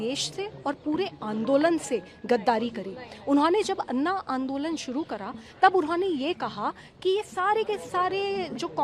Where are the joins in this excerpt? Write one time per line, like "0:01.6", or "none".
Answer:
none

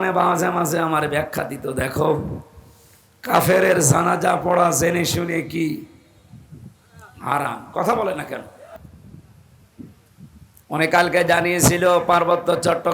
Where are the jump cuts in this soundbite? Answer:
0:08.7

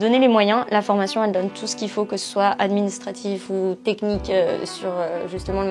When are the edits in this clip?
none

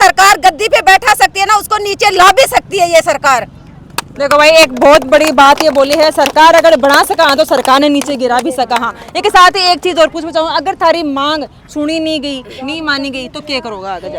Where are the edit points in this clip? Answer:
none

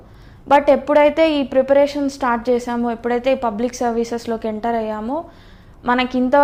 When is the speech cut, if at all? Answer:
none

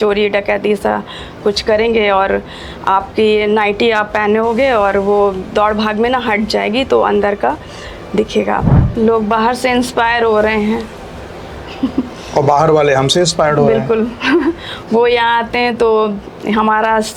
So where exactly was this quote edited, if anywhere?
0:08.8

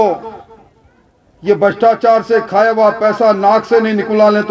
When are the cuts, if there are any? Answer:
none

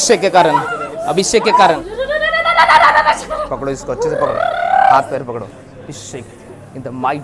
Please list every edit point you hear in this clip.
0:01.9

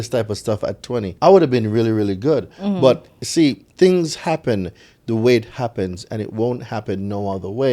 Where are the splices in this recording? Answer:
0:01.1
0:03.6

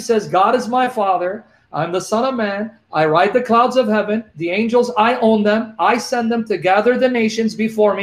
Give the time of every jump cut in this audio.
none

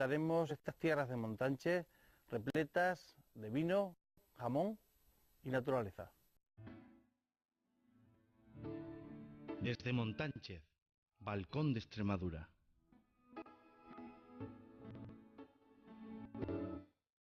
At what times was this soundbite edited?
none

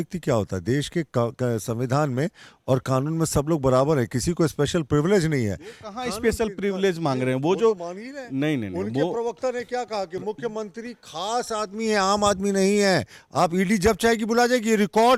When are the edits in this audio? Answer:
none

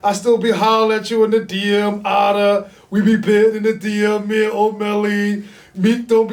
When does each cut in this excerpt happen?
none

